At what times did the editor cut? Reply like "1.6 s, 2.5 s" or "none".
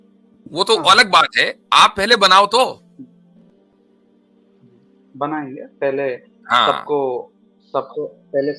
3.1 s, 5.1 s